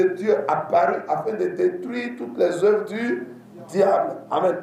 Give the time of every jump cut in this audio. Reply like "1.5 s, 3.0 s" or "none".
none

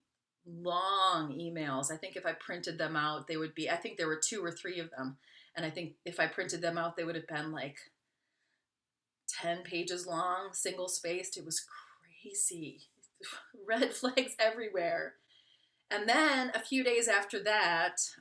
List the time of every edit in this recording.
none

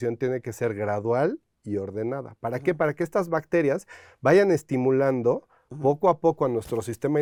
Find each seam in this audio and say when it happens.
none

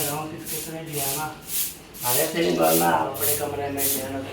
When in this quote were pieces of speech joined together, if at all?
3.1 s

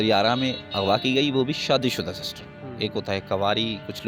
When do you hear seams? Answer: none

